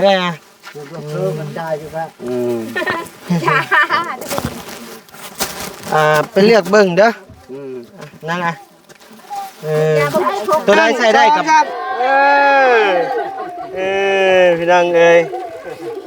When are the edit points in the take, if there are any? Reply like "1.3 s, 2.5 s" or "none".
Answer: 11.1 s